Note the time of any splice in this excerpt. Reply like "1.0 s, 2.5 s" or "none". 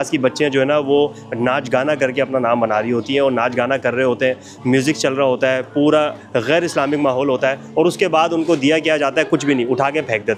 none